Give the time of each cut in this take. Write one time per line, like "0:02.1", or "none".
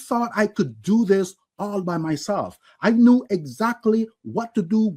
none